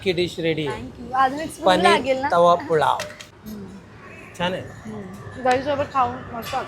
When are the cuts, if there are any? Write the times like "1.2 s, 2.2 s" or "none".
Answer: 3.3 s